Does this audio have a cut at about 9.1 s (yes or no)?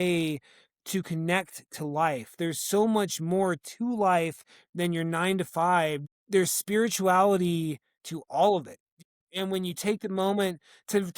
yes